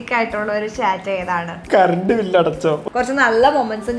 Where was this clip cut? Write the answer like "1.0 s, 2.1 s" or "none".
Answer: 1.5 s, 2.8 s